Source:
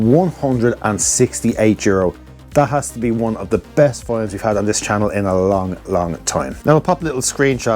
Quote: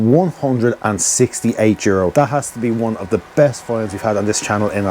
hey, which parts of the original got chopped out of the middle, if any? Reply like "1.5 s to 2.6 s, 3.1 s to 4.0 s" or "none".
2.1 s to 2.5 s